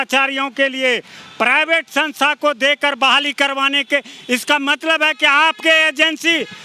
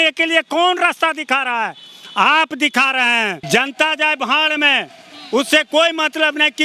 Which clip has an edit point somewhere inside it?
second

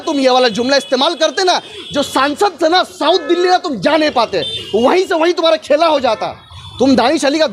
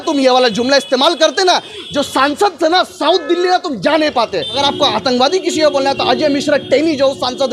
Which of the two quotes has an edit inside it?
second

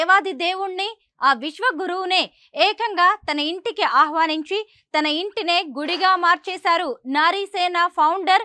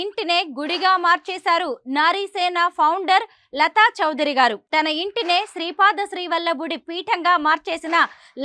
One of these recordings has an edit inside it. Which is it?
second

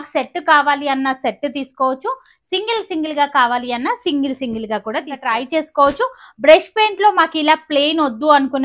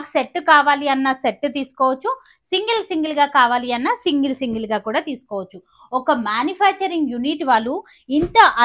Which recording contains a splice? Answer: first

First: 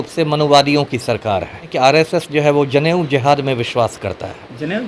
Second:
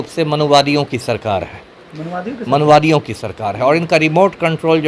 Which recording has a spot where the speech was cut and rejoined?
first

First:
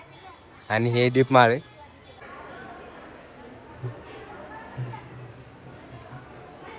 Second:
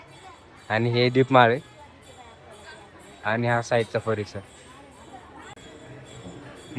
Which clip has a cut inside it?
first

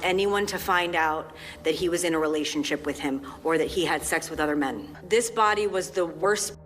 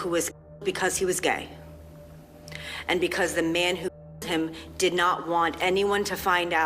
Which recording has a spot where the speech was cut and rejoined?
first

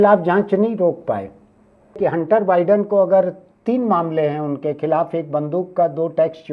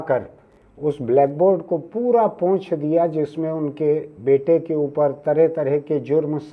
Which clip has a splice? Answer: first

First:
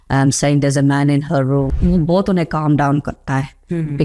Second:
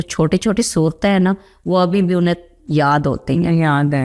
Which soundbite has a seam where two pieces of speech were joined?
first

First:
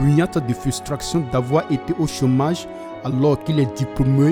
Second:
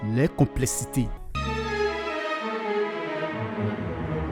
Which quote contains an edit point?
second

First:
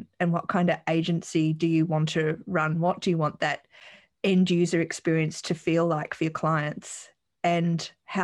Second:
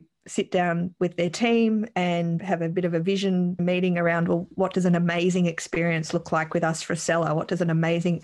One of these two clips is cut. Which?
second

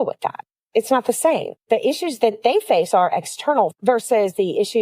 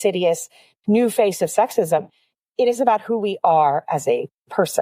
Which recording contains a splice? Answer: first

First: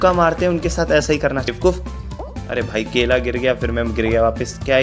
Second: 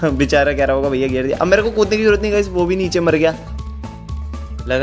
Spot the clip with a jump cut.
first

